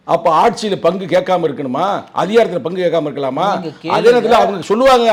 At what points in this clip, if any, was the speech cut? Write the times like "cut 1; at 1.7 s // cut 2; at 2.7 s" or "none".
none